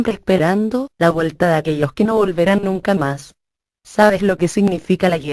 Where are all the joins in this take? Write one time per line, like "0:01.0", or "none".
0:02.1